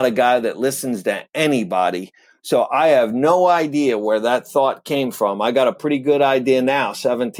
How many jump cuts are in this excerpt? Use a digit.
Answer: 0